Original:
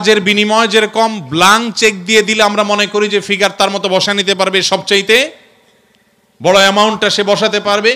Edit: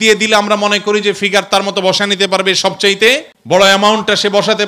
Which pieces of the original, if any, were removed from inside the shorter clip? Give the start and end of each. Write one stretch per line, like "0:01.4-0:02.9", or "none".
0:05.4-0:06.3